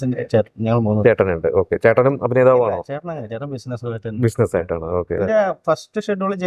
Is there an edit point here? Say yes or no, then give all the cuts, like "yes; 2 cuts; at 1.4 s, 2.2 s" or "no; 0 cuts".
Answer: yes; 1 cut; at 5.1 s